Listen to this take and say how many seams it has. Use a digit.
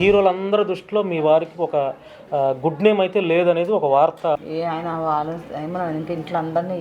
1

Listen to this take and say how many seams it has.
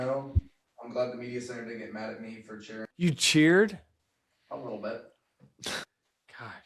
1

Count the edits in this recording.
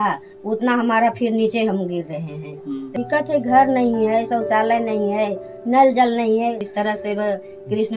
2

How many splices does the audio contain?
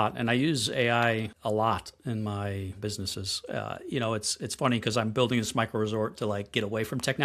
2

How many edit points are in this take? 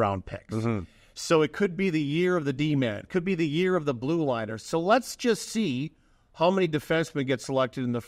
0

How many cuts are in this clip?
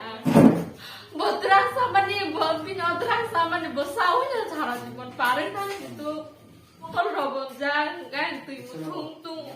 1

